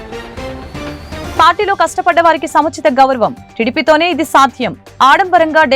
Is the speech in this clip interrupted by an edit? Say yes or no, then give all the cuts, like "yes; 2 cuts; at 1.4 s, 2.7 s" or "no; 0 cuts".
yes; 1 cut; at 1.3 s